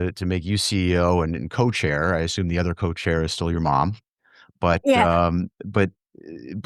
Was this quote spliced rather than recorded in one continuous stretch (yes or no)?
no